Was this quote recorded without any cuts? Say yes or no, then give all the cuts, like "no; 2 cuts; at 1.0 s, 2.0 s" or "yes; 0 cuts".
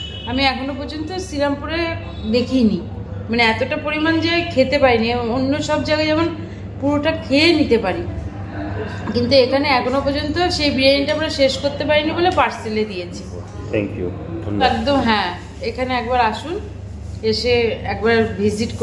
no; 1 cut; at 14.6 s